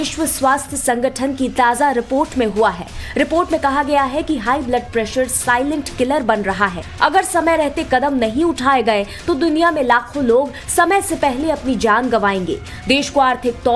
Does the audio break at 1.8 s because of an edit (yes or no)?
yes